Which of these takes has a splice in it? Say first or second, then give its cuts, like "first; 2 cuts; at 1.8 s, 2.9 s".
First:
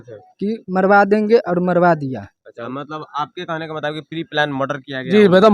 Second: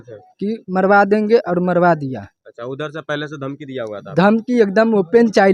first; 1 cut; at 2.5 s